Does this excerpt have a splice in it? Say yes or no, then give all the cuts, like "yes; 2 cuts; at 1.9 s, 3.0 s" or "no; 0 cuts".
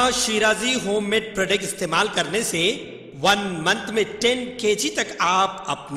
no; 0 cuts